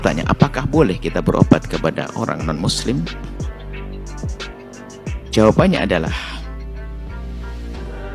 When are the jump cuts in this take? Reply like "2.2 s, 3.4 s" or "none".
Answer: 3.4 s, 4.9 s